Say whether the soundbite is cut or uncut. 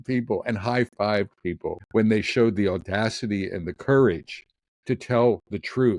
cut